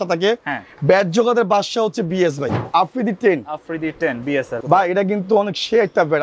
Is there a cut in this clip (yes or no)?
yes